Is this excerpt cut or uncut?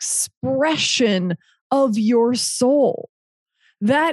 uncut